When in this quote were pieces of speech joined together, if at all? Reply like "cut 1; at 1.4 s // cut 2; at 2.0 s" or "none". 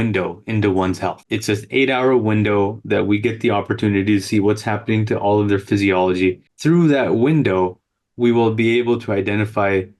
cut 1; at 1.2 s // cut 2; at 6.5 s